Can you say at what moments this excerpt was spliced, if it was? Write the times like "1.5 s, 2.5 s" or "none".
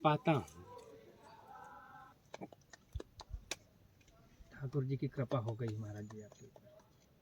2.1 s